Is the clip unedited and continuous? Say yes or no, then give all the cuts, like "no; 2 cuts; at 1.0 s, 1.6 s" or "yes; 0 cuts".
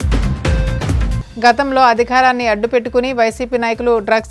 no; 1 cut; at 1.2 s